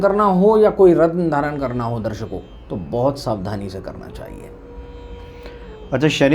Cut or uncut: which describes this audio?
uncut